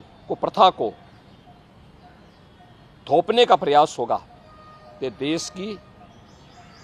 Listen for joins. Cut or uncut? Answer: uncut